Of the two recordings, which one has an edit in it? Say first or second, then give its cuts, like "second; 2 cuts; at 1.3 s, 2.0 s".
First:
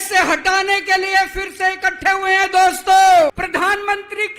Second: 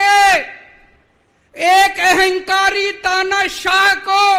first; 1 cut; at 3.3 s